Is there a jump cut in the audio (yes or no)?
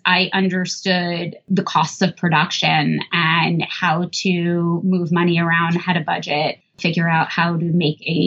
yes